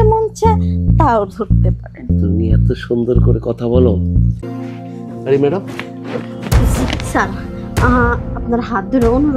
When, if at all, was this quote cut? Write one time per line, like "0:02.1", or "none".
0:04.4